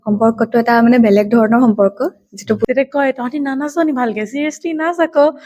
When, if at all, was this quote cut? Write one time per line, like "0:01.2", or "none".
0:02.6